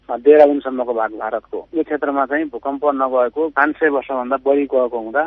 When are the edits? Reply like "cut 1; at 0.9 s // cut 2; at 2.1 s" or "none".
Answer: cut 1; at 1.6 s // cut 2; at 3.5 s